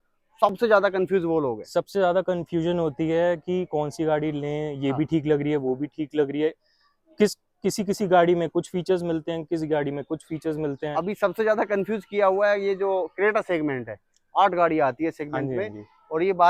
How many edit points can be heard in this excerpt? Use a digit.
0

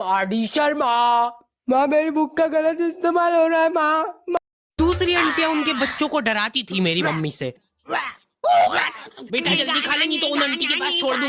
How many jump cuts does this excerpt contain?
1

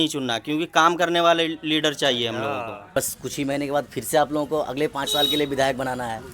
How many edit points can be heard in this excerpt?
1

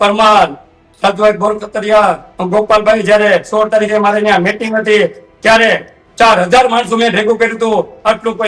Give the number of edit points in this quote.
0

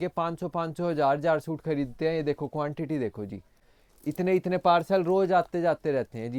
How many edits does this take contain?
0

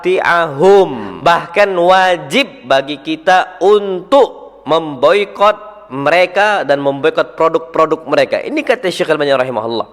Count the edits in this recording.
1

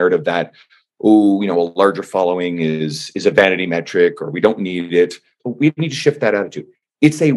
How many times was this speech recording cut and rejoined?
1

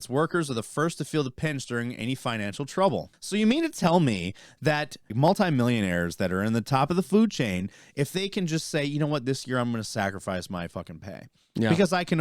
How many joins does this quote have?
2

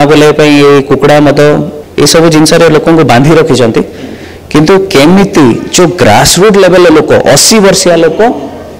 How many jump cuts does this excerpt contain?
1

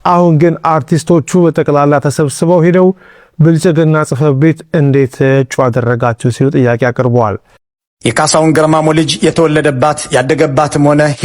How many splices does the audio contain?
1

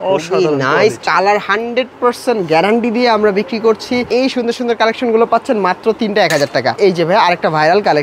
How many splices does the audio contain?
3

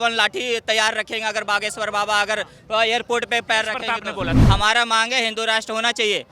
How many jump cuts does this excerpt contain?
1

